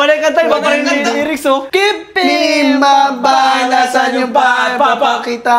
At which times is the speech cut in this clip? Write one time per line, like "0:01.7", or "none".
0:01.6